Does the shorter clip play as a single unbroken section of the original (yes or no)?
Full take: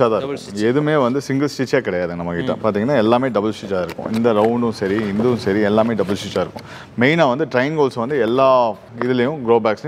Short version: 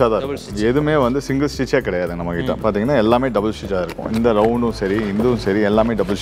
yes